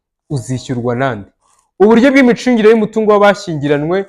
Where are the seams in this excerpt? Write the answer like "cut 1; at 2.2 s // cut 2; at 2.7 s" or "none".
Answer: cut 1; at 1.4 s

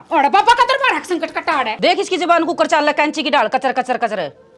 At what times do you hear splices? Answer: cut 1; at 1.7 s

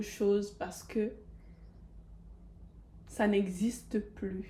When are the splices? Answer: none

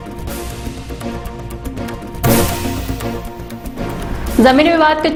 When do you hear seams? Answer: none

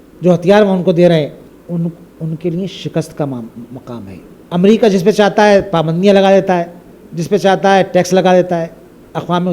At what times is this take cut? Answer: cut 1; at 1.5 s // cut 2; at 4.3 s

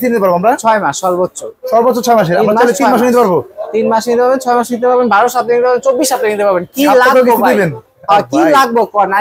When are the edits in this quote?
none

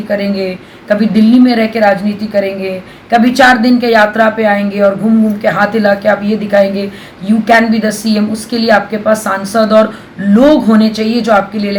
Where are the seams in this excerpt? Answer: none

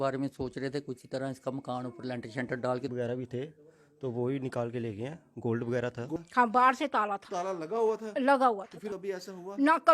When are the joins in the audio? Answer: cut 1; at 2.9 s // cut 2; at 6.2 s // cut 3; at 8.9 s

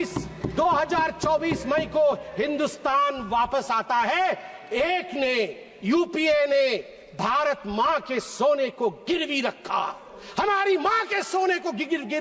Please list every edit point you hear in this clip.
none

